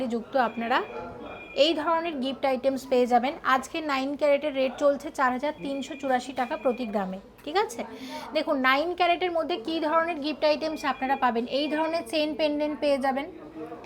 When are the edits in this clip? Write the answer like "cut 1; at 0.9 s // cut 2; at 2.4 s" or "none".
none